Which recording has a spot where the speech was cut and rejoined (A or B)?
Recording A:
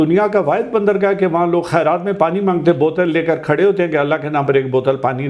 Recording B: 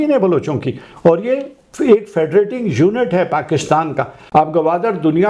B